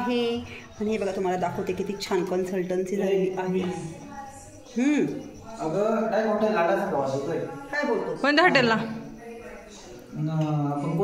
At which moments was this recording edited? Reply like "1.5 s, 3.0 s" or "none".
none